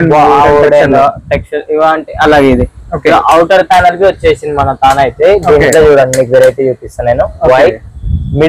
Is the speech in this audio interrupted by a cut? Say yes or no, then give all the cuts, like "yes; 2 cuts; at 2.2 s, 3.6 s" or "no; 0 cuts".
no; 0 cuts